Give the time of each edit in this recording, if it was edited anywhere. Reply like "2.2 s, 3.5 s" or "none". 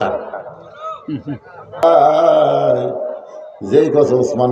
1.8 s